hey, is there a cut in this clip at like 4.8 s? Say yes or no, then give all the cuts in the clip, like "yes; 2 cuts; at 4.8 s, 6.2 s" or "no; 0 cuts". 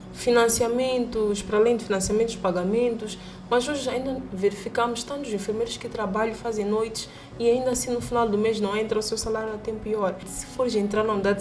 no; 1 cut; at 10.4 s